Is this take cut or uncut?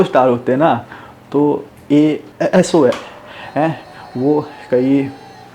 cut